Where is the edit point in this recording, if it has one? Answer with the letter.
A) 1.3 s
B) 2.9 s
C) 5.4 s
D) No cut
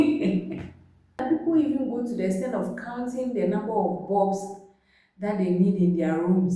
A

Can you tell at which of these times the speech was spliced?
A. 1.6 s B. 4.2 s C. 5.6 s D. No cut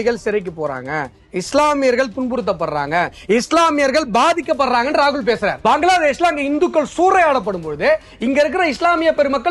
C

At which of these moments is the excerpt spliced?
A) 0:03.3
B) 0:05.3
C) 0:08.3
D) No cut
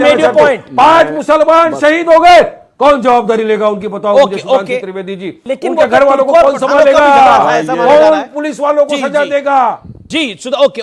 D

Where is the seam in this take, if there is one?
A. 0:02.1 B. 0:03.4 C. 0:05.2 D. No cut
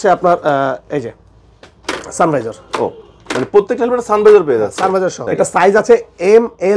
C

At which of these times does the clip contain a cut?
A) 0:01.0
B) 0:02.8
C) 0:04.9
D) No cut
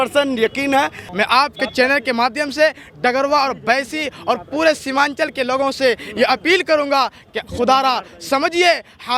A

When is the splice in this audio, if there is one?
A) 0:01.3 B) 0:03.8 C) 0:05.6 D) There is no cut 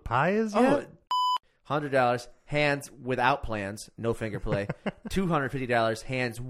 A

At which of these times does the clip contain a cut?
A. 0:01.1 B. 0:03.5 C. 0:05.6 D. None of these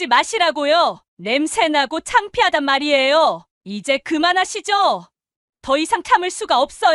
B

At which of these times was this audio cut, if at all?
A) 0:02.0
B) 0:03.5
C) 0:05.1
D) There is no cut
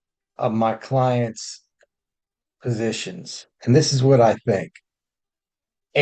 D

